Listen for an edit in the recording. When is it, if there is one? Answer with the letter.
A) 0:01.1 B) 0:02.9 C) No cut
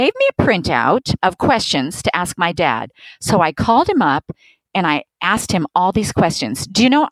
A